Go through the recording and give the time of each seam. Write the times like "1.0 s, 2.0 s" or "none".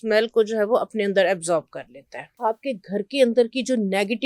2.2 s